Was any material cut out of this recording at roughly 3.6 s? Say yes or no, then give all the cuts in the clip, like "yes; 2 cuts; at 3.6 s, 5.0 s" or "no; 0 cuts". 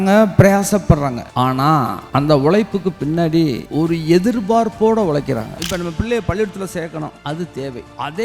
yes; 4 cuts; at 1.6 s, 3.6 s, 5.6 s, 7.5 s